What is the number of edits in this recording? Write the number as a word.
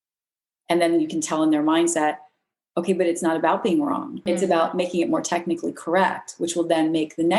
one